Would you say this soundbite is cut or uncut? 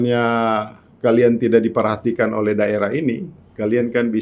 uncut